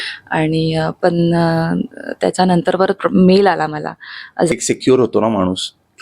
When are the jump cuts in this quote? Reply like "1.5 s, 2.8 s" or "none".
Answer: 4.5 s